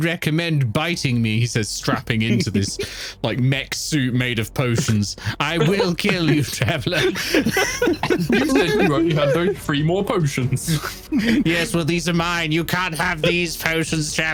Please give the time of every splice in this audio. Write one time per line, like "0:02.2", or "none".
none